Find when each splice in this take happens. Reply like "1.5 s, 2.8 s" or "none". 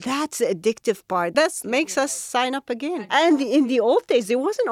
1.4 s, 3.1 s